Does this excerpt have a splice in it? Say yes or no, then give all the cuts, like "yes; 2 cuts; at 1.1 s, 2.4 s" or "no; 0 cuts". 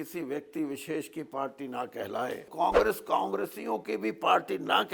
yes; 1 cut; at 2.5 s